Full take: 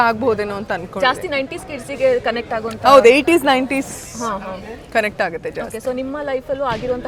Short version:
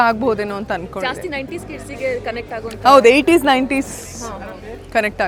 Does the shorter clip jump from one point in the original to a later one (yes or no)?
no